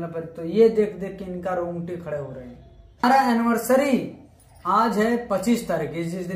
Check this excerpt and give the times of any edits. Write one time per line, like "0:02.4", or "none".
0:03.0

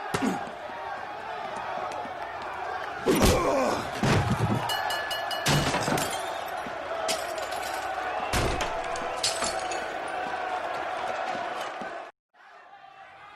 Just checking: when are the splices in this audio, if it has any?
0:12.3

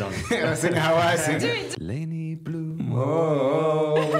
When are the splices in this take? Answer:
0:01.7

